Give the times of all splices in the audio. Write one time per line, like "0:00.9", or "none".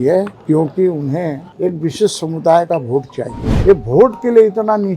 0:01.5
0:03.4